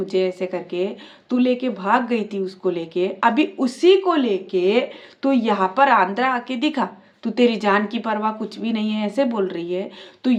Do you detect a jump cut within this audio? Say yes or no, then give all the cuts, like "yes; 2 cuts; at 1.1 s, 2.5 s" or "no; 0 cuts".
no; 0 cuts